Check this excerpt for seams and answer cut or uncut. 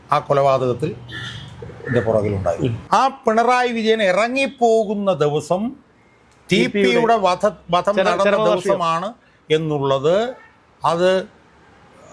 cut